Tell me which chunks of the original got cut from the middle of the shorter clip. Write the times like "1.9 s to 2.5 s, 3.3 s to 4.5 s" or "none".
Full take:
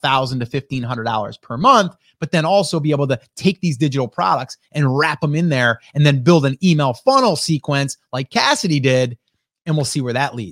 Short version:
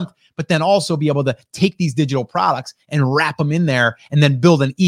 none